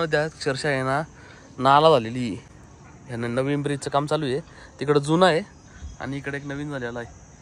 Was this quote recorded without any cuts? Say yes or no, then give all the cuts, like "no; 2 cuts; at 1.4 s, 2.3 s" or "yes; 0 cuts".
yes; 0 cuts